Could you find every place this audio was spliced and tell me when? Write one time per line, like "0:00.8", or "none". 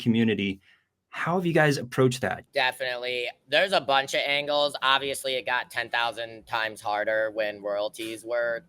0:02.4